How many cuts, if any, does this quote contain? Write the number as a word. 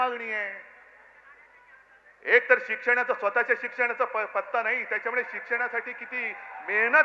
zero